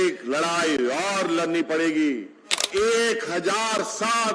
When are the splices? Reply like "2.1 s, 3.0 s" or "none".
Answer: 2.6 s